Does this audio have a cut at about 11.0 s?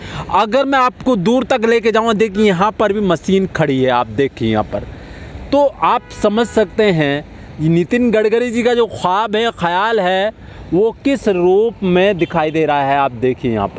no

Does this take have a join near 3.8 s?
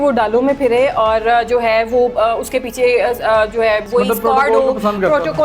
yes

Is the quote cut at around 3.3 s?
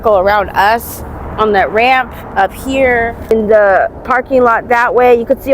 yes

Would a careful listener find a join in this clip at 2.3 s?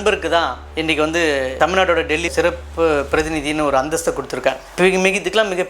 yes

